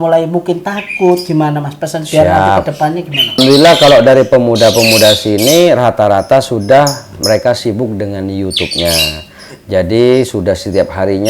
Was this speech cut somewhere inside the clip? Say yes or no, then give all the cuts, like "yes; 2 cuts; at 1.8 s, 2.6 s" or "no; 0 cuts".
yes; 1 cut; at 3.2 s